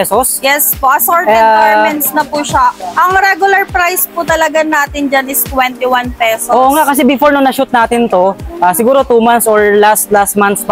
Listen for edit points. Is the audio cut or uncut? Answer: uncut